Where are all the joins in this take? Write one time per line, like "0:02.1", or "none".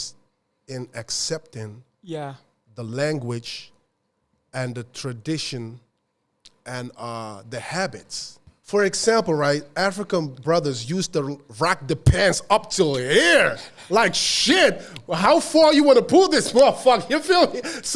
0:08.5